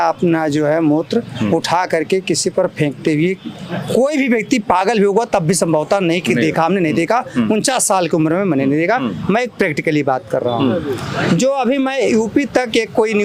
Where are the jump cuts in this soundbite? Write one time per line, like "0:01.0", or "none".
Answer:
none